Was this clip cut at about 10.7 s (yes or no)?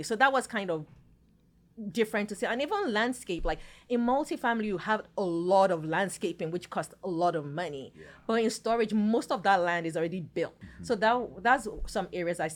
yes